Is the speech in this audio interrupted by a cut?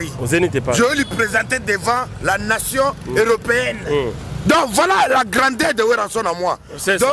no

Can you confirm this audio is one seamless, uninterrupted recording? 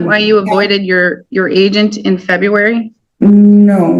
no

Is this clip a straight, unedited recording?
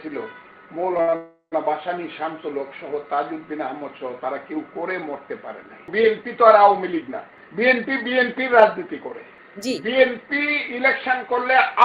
no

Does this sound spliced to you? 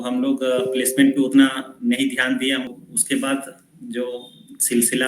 yes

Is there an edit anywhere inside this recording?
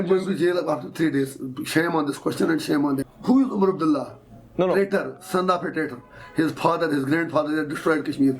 yes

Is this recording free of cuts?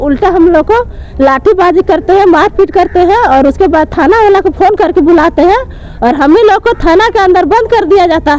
yes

